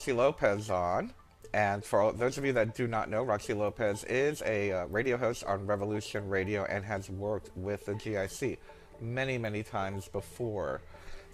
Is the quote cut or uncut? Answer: cut